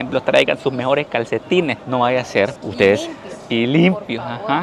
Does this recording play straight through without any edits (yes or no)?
yes